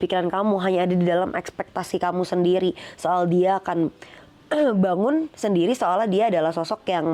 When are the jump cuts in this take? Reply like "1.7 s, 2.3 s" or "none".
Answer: none